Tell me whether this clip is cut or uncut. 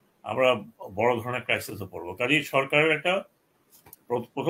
uncut